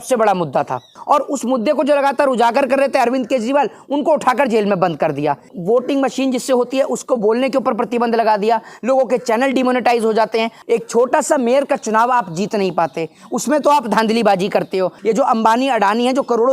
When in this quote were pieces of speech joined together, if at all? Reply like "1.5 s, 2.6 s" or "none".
0.9 s, 5.5 s, 10.6 s, 14.9 s